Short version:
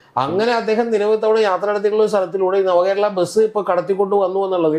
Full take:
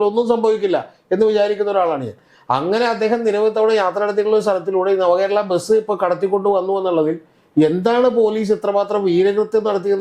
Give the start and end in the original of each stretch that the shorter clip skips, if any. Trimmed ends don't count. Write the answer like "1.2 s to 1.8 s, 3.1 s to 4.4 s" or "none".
none